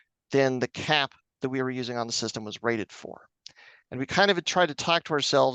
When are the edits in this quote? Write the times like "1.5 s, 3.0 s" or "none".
none